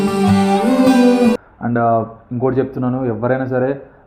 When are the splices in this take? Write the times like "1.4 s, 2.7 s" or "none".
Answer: none